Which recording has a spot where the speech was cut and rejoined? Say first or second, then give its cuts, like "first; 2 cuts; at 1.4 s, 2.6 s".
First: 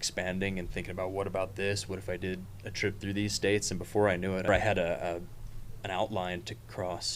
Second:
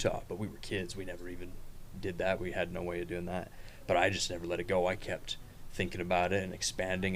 first; 1 cut; at 4.5 s